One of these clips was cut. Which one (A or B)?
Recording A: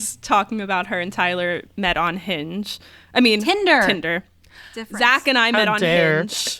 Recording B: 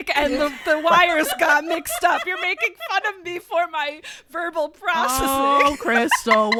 A